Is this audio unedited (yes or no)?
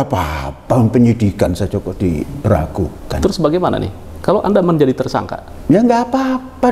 yes